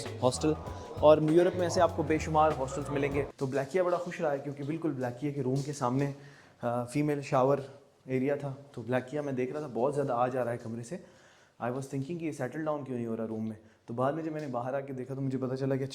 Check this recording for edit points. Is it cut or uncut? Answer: cut